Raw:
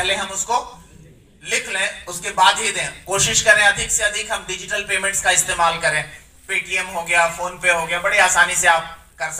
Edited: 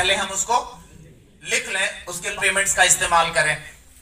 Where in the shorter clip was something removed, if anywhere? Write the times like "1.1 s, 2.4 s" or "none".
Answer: 2.3 s